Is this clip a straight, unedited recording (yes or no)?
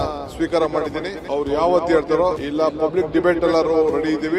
no